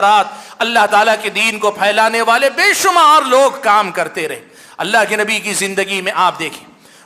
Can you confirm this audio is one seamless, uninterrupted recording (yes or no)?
yes